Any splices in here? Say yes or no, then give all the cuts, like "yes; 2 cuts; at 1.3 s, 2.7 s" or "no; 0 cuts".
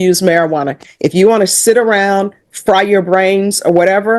no; 0 cuts